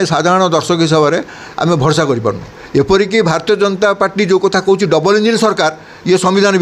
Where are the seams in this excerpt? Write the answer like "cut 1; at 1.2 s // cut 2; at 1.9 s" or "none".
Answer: cut 1; at 2.5 s